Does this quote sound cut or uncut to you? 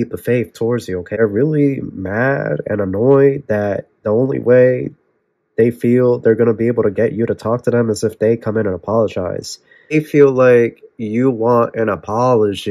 cut